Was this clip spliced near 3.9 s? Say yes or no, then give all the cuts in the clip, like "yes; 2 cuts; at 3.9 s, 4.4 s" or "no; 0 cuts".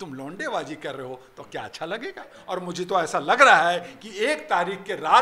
no; 1 cut; at 2.4 s